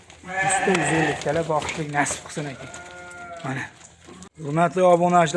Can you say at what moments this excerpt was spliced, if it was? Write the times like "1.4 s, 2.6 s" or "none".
4.3 s